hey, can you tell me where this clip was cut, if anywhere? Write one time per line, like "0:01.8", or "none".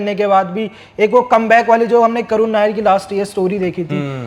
none